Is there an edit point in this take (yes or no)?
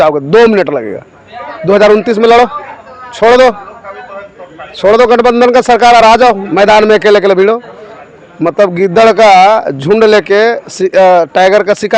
no